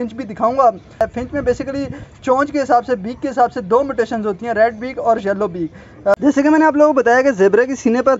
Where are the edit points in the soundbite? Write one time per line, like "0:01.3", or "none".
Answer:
0:01.0
0:06.1